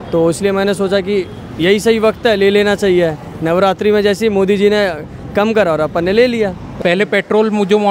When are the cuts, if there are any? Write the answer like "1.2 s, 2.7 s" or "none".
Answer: 6.7 s